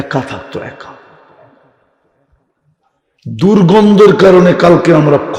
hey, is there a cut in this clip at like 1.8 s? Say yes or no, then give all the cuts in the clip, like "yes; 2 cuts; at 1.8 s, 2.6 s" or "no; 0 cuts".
no; 0 cuts